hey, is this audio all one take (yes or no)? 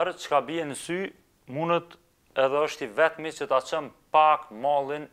yes